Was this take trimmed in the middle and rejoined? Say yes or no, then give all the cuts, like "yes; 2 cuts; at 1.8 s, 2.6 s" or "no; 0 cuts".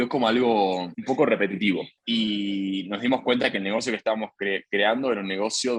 yes; 2 cuts; at 0.9 s, 1.9 s